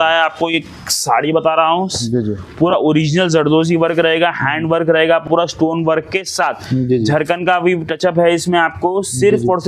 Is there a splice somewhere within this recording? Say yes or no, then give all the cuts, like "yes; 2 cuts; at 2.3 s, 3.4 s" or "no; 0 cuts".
no; 0 cuts